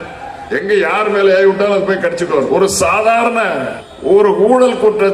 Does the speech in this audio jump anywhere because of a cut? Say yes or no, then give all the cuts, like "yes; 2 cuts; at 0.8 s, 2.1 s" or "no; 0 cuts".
yes; 2 cuts; at 2.5 s, 3.8 s